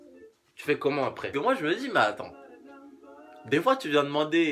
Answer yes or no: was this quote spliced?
yes